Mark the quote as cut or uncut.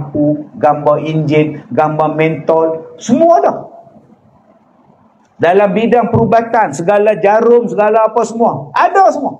uncut